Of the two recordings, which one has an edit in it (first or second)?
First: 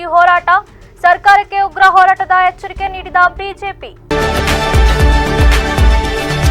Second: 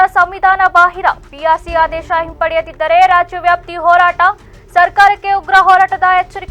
first